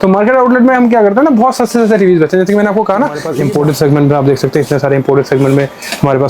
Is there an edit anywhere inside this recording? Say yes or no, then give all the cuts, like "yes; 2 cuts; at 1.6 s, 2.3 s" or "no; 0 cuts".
yes; 1 cut; at 3.3 s